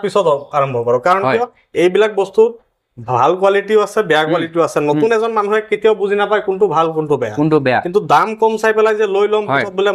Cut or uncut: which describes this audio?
uncut